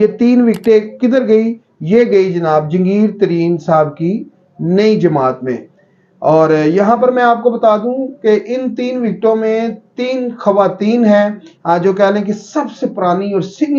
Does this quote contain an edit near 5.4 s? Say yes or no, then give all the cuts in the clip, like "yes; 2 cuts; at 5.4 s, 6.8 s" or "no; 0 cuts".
no; 0 cuts